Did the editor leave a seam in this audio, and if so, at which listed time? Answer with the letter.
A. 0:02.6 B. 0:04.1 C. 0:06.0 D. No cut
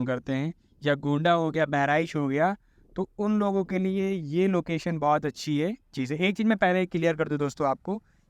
C